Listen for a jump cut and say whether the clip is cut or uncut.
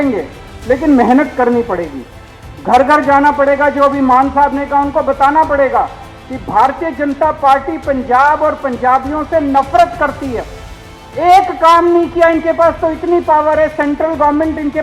uncut